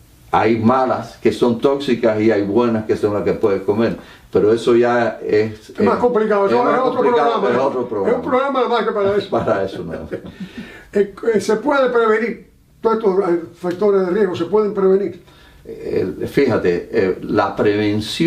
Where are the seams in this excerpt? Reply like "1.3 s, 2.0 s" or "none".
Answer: 16.5 s